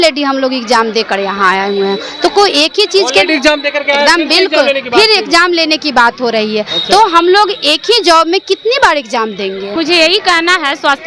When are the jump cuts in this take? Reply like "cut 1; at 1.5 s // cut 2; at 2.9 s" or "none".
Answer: cut 1; at 9.7 s